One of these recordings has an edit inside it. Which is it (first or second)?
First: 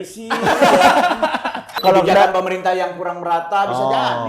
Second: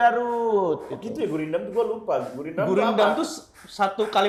first